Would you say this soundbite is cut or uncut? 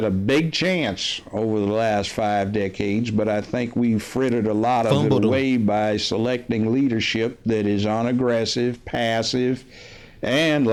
uncut